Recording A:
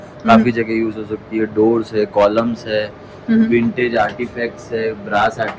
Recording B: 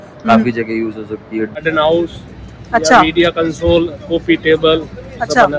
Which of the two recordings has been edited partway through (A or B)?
B